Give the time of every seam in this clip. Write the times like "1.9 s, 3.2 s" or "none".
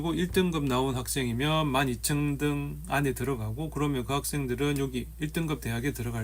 none

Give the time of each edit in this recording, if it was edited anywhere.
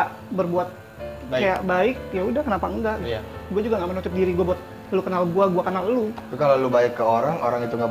none

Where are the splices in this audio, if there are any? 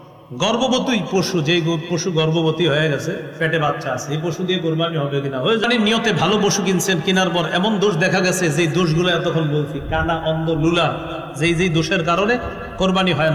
5.6 s

